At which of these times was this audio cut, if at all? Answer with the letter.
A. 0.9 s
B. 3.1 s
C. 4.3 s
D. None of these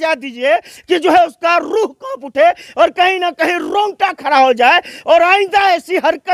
D